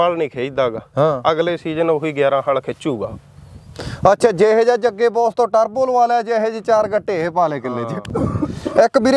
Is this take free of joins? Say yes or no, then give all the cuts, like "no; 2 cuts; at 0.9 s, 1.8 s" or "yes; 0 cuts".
no; 1 cut; at 8.1 s